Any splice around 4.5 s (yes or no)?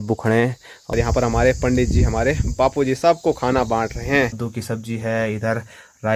yes